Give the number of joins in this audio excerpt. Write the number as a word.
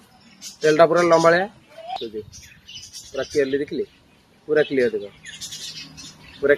one